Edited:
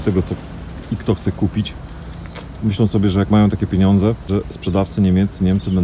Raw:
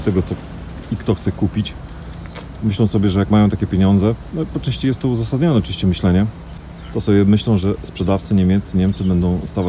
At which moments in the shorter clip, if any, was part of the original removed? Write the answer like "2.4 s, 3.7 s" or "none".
4.3 s